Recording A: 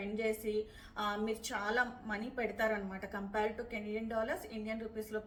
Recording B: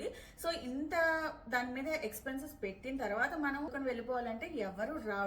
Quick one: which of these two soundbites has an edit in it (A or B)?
B